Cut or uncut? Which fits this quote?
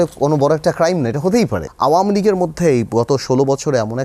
cut